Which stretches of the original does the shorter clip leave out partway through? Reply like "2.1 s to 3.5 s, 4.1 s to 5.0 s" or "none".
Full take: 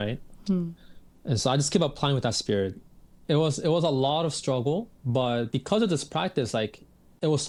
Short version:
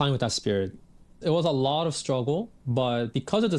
3.2 s to 3.6 s